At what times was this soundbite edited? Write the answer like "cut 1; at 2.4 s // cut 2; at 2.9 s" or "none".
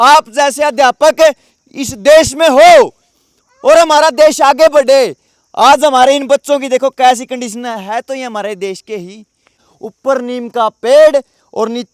cut 1; at 9.6 s